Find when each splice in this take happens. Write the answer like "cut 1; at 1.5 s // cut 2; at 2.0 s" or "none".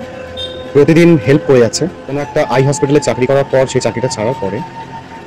cut 1; at 2.2 s